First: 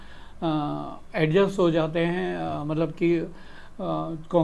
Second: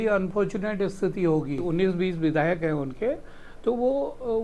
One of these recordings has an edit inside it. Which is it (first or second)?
second